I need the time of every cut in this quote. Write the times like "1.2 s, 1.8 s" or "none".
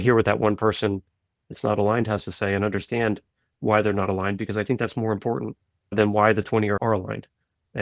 5.9 s, 6.8 s